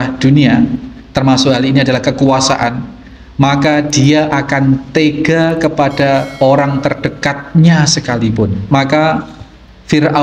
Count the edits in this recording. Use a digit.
1